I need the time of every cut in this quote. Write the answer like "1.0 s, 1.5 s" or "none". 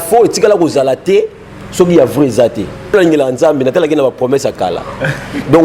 2.9 s